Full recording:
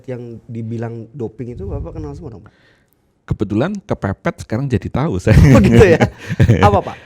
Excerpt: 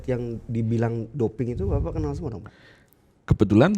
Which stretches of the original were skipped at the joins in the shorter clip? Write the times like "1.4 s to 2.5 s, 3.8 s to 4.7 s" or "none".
none